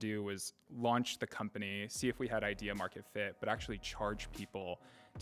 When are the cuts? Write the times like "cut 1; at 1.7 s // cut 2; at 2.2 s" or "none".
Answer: none